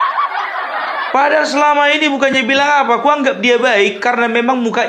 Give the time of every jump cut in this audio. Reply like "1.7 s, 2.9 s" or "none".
1.1 s